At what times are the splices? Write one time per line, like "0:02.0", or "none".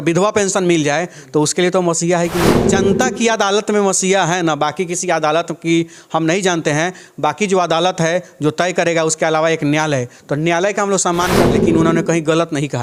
0:02.6
0:11.5